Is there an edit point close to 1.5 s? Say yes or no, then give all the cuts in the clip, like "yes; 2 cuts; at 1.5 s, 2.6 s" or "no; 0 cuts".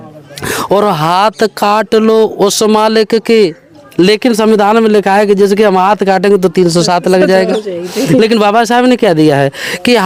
no; 0 cuts